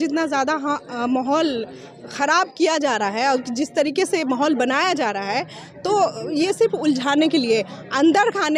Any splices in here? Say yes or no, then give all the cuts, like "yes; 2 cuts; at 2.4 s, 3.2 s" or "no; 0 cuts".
no; 0 cuts